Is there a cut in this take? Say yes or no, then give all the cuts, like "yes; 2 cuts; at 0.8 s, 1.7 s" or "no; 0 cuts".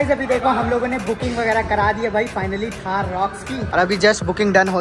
yes; 1 cut; at 3.7 s